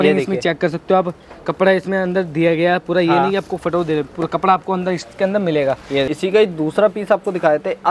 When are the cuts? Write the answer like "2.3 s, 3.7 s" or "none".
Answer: 6.1 s